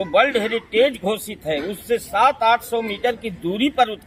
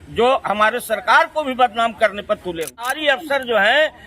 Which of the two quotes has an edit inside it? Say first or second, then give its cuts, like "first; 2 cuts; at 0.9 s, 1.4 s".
second; 1 cut; at 3.0 s